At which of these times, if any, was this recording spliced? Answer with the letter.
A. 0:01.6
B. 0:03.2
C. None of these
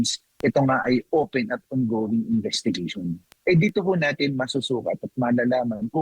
B